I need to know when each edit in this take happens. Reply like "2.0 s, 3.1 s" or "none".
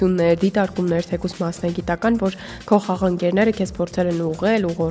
none